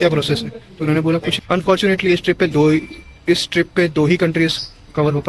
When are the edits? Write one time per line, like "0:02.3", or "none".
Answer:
0:01.3